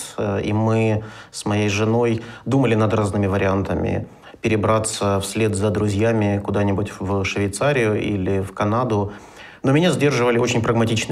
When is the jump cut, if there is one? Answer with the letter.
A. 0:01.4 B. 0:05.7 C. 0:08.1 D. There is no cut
D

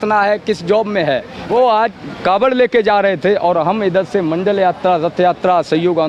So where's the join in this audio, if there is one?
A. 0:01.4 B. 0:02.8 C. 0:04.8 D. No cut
A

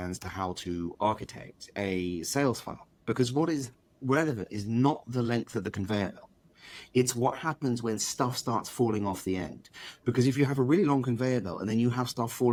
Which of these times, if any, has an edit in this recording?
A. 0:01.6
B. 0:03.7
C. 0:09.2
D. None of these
D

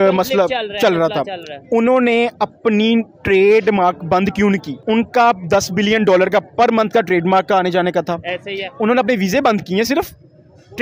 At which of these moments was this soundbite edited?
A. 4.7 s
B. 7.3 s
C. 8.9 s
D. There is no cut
A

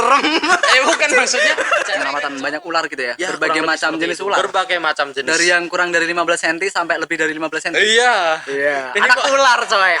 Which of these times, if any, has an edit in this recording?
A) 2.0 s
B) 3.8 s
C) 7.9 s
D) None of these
A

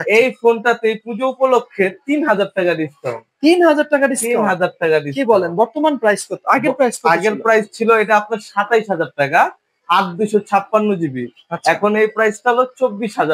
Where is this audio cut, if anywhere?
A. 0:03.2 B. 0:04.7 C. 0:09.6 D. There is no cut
D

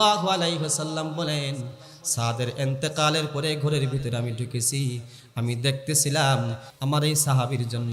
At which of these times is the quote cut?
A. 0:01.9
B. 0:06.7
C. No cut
B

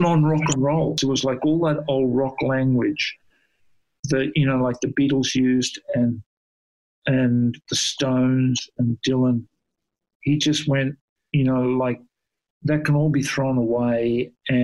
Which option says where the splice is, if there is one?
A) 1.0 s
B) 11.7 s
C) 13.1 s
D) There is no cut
A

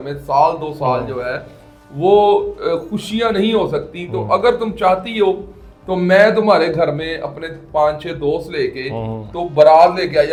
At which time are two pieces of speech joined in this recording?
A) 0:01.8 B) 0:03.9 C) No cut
C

